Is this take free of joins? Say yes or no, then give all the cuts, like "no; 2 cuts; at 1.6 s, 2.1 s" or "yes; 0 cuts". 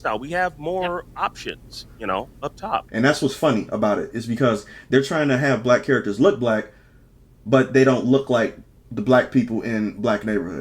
no; 1 cut; at 2.9 s